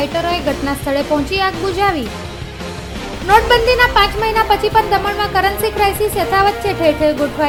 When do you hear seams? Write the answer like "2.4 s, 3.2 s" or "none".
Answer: none